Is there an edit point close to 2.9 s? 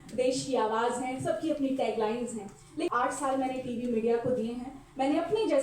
yes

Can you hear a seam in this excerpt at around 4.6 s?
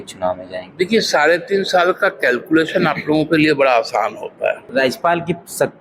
yes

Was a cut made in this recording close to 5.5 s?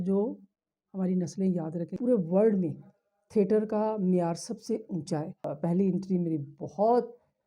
yes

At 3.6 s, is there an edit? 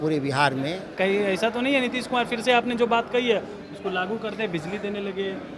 no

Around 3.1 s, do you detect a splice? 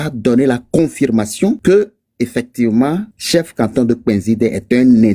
yes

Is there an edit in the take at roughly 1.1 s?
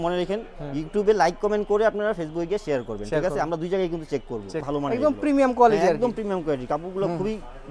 no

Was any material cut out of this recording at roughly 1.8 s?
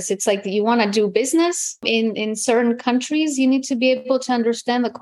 yes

